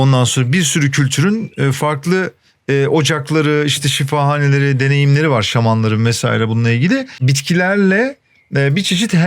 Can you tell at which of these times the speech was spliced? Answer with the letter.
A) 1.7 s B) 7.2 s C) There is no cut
B